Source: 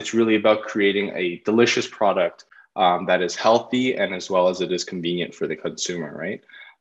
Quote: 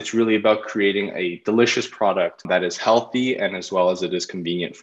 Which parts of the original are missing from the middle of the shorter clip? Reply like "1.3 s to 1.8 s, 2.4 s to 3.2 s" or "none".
2.4 s to 3.0 s